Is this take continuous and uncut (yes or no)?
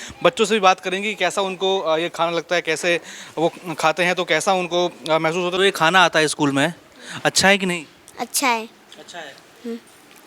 no